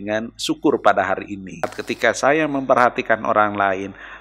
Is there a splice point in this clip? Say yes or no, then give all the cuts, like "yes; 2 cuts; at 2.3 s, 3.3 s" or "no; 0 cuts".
yes; 1 cut; at 1.8 s